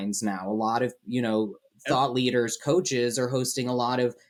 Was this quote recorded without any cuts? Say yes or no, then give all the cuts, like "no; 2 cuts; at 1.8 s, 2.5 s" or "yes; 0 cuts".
yes; 0 cuts